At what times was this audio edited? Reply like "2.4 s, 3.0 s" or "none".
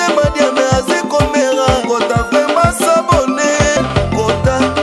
3.8 s